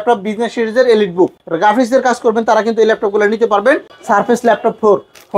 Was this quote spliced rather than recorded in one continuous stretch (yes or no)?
yes